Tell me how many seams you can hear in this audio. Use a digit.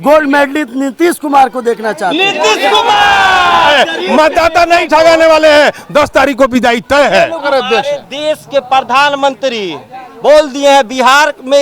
2